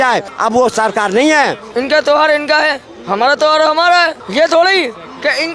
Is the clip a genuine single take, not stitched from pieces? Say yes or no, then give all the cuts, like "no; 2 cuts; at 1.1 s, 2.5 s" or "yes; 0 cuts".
no; 2 cuts; at 1.6 s, 4.2 s